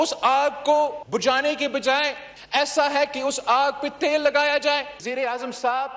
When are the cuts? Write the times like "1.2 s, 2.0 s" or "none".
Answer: 5.0 s